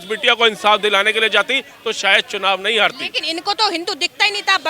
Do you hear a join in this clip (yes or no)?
no